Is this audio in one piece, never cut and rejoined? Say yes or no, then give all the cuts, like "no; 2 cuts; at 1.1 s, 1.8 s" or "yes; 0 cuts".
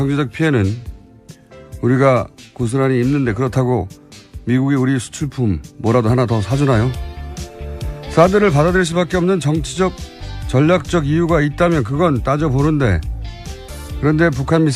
yes; 0 cuts